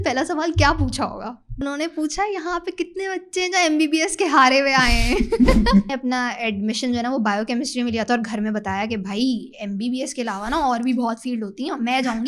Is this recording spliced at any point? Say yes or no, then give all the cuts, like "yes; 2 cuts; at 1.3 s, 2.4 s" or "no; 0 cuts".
yes; 2 cuts; at 1.6 s, 5.9 s